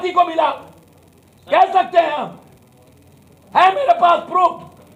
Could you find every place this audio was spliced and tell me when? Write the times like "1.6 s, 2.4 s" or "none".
none